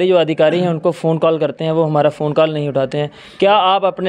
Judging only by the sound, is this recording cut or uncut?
uncut